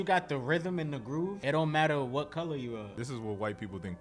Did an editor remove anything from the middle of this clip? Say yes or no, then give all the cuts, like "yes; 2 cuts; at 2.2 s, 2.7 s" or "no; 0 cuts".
yes; 2 cuts; at 1.4 s, 2.9 s